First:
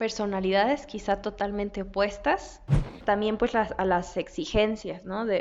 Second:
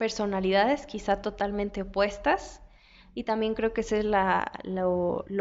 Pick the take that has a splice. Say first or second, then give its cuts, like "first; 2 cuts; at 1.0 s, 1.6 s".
first; 1 cut; at 2.9 s